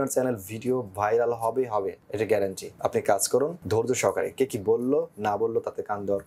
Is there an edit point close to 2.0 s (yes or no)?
yes